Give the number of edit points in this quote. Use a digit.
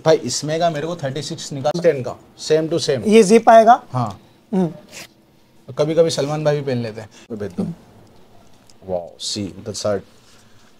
2